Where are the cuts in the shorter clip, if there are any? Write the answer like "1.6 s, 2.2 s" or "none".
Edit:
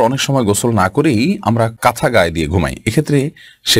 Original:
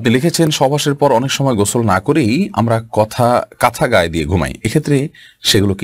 1.7 s